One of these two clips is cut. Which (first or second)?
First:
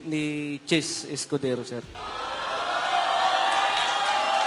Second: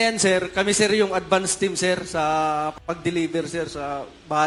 first